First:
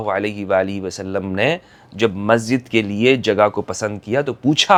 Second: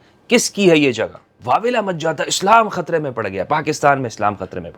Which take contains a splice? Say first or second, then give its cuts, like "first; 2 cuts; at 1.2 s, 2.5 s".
second; 1 cut; at 1.3 s